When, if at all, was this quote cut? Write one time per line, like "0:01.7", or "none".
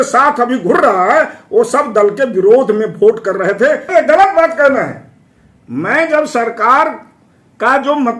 0:03.9